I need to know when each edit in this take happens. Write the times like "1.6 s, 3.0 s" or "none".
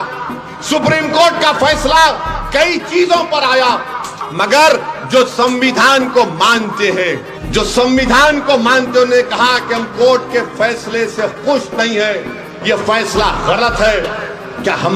4.2 s, 7.3 s